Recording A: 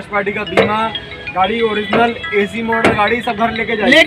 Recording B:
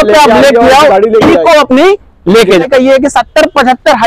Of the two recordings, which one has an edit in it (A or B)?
B